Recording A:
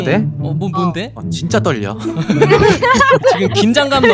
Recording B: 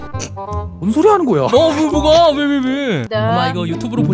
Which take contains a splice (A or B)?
B